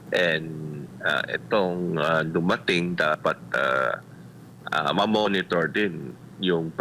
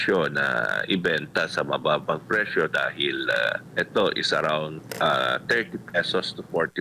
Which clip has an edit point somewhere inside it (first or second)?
second